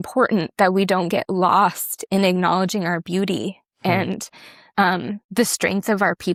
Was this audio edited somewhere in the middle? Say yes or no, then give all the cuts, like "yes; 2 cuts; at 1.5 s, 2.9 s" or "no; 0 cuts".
no; 0 cuts